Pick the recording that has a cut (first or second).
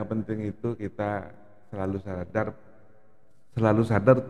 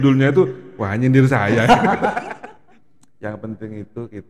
second